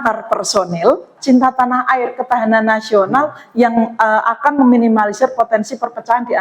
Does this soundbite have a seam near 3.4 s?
no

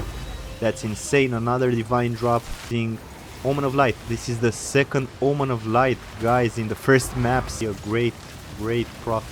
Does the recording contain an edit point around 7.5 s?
yes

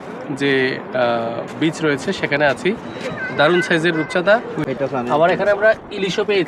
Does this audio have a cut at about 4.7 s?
yes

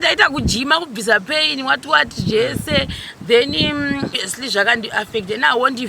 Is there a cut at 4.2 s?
yes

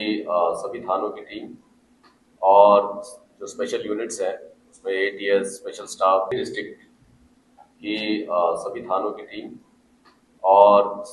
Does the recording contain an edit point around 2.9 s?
no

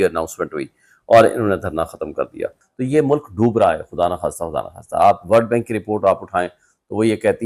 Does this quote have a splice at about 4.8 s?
no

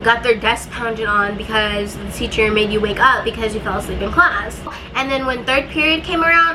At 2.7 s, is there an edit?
no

